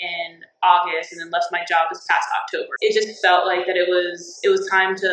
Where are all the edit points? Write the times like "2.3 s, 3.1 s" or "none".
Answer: 2.7 s